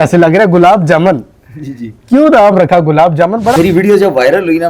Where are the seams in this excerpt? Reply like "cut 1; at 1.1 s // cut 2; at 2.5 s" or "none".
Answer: cut 1; at 3.5 s